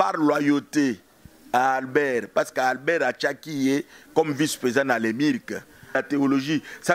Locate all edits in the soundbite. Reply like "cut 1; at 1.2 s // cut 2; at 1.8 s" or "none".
cut 1; at 6.0 s